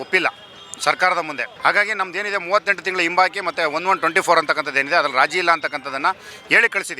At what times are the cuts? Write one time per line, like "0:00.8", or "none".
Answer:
0:01.4